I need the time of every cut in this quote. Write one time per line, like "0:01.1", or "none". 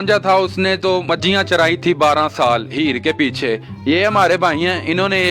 0:01.1